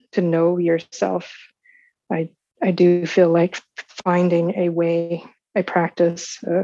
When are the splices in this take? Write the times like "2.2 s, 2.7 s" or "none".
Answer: none